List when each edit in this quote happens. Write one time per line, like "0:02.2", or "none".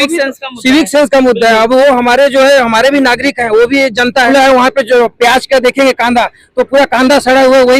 0:04.3